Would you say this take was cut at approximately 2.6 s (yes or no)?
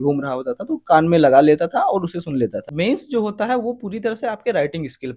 yes